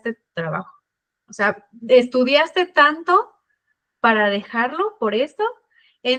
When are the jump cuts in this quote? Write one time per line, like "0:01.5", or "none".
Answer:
none